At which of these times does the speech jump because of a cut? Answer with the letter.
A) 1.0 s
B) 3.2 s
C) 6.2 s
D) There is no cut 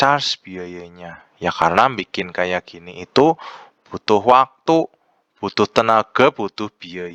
D